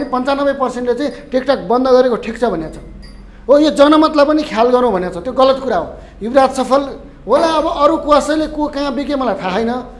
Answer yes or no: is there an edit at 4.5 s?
no